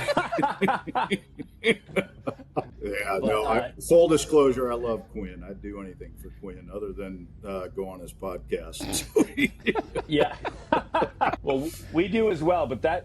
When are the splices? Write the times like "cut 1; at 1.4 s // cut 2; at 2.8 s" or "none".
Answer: cut 1; at 2.7 s // cut 2; at 11.4 s